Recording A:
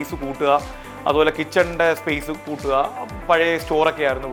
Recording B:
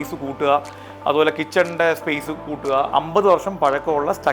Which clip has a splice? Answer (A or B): B